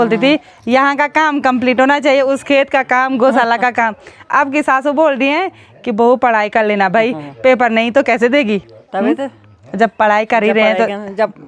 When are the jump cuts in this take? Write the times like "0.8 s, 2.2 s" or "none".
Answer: none